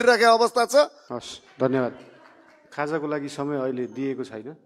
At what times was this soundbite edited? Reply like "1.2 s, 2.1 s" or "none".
1.1 s